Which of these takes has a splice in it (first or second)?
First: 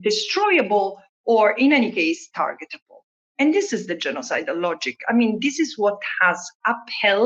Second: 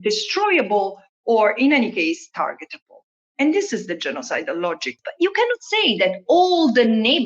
second